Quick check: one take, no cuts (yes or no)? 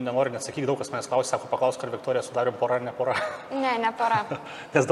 yes